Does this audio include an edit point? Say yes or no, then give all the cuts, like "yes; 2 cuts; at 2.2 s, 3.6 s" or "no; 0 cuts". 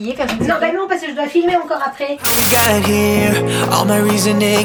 no; 0 cuts